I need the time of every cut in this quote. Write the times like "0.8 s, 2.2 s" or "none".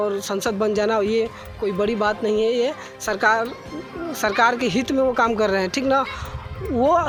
none